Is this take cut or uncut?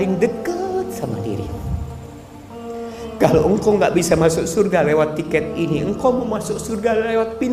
uncut